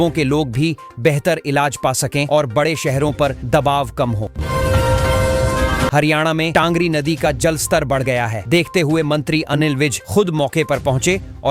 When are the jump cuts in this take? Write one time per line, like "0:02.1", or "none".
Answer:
0:04.3
0:05.9